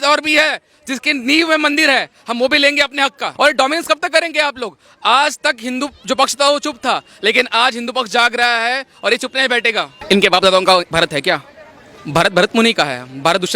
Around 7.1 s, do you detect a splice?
no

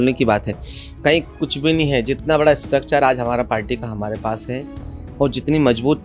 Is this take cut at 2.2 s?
no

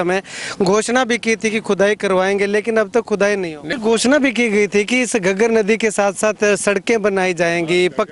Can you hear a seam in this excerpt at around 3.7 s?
yes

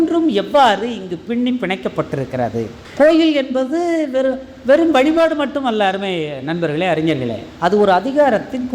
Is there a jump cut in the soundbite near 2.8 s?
yes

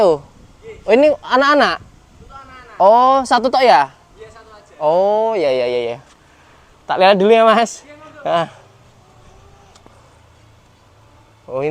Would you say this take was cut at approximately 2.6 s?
no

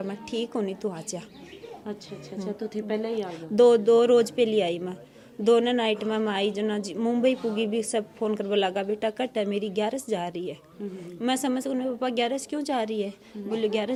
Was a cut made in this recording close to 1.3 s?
no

